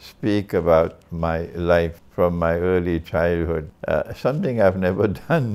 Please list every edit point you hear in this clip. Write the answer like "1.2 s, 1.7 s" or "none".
2.0 s, 3.7 s